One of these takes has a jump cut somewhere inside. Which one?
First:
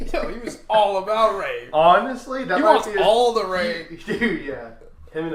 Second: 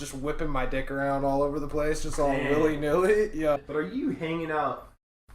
second; 1 cut; at 3.6 s

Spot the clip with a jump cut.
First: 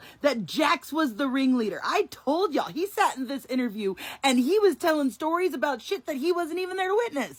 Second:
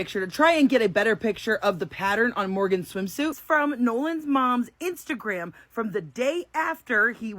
second; 1 cut; at 3.3 s

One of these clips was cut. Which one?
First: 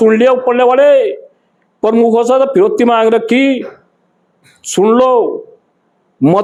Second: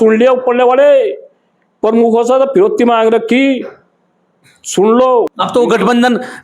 second; 1 cut; at 5.3 s

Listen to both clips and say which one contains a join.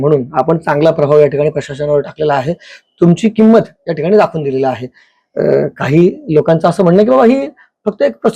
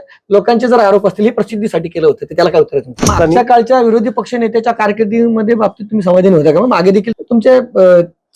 second; 2 cuts; at 3.1 s, 7.1 s

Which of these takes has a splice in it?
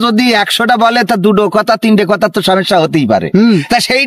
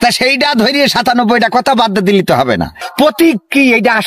second; 1 cut; at 2.8 s

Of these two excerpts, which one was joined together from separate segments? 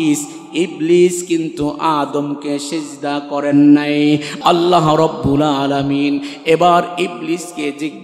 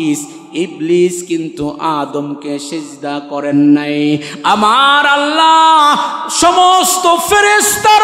first; 1 cut; at 4.3 s

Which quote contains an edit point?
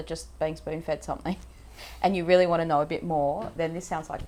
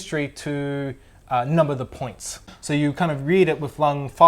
second; 1 cut; at 2.5 s

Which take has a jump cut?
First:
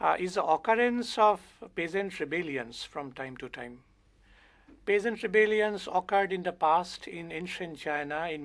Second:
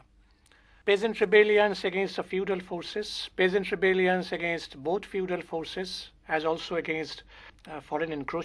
first; 1 cut; at 3.1 s

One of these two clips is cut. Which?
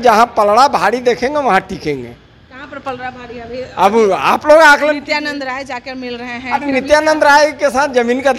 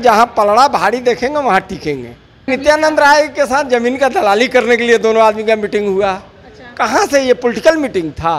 second; 1 cut; at 2.5 s

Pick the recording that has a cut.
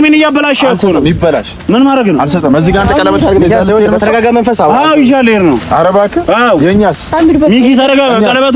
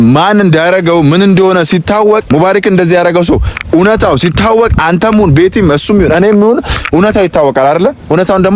second; 1 cut; at 2.2 s

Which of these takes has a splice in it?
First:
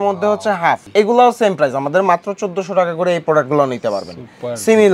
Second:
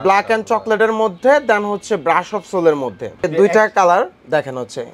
second; 1 cut; at 3.2 s

